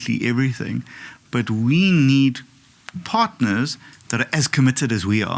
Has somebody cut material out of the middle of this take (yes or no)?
no